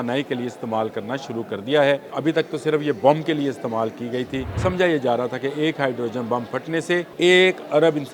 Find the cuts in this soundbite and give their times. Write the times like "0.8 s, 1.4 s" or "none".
2.1 s, 4.5 s, 7.1 s